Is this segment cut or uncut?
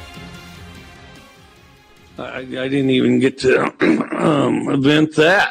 cut